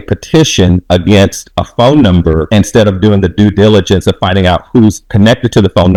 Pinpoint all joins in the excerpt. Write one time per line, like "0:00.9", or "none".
none